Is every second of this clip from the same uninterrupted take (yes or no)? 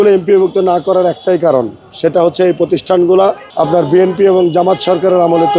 yes